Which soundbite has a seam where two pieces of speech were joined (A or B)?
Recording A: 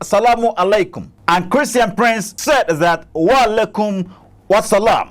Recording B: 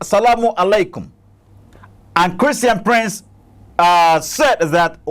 A